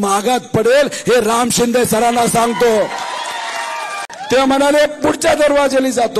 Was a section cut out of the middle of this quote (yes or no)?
yes